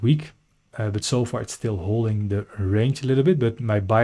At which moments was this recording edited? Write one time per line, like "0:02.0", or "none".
none